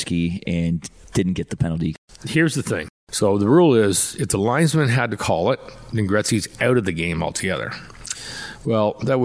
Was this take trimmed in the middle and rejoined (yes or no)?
yes